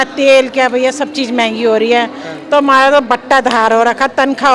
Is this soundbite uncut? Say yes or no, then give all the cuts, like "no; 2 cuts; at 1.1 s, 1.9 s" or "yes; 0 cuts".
yes; 0 cuts